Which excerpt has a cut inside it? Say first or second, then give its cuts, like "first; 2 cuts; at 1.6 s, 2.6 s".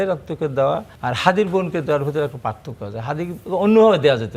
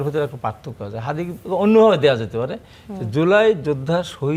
first; 1 cut; at 0.9 s